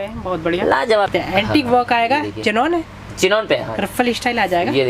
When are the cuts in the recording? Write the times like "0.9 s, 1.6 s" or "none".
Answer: 1.1 s